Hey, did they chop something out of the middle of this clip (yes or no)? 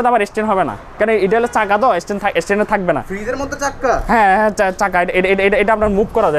no